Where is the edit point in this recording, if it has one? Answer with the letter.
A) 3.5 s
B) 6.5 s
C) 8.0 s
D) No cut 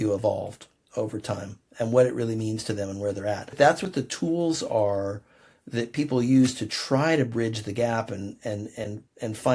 A